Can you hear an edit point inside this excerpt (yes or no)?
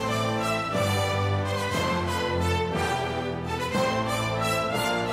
no